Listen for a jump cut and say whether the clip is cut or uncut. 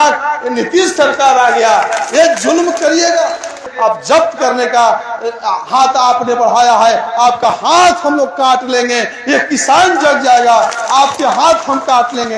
cut